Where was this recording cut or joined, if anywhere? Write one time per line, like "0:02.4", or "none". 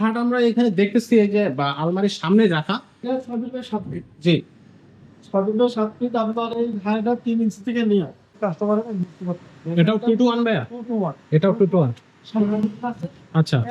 0:03.1
0:08.3